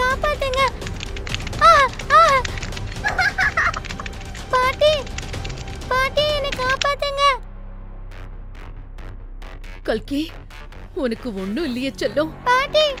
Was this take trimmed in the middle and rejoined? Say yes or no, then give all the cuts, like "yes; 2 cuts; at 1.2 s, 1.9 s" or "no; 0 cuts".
no; 0 cuts